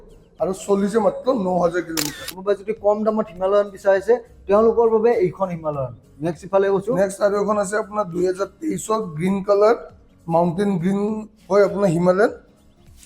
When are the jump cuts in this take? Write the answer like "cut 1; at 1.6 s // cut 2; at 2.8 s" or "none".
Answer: cut 1; at 2.3 s